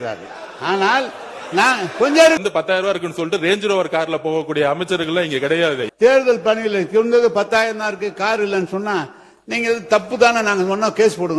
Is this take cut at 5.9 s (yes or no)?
yes